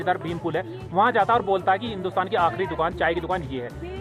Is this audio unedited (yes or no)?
yes